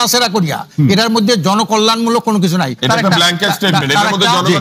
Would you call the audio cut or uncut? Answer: cut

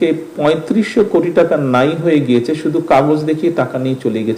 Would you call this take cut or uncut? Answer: uncut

